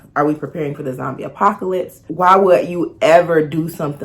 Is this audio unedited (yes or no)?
no